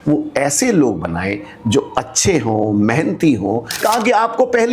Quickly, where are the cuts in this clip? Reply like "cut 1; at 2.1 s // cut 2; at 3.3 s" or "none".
cut 1; at 3.8 s